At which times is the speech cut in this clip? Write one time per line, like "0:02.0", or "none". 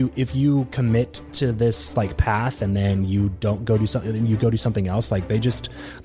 none